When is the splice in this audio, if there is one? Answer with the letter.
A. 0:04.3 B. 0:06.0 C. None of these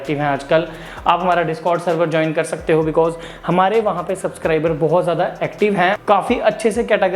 B